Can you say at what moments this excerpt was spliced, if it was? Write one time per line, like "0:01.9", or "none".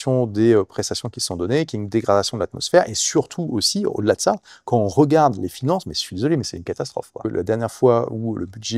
0:07.3